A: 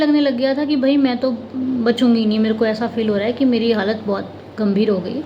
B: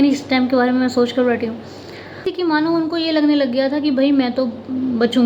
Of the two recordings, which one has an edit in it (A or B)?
B